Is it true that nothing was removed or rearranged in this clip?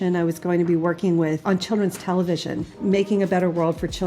no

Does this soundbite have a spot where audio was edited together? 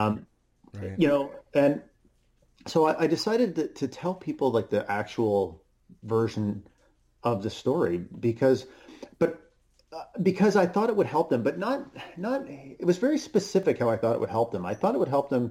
no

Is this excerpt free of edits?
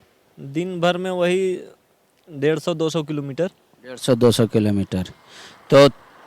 yes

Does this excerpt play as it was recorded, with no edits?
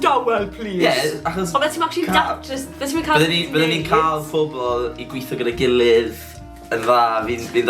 yes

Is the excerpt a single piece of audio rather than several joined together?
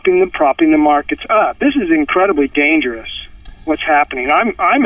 yes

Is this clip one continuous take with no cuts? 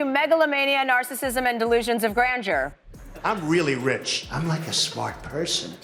yes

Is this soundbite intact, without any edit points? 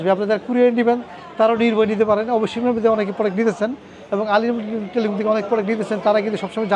yes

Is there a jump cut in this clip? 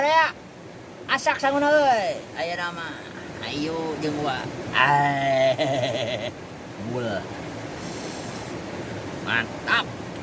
no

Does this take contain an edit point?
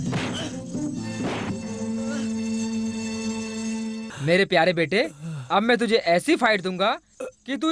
no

